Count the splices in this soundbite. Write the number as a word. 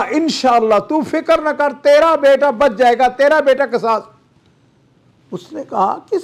zero